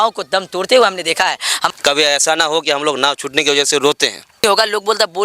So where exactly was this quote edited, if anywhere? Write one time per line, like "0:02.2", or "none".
0:01.6
0:04.4